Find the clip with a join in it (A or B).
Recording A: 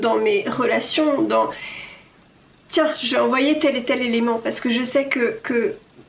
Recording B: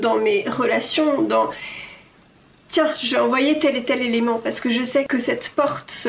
B